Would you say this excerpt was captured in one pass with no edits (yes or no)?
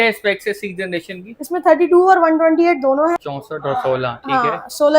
no